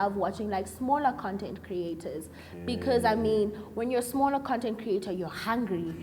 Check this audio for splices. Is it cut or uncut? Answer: uncut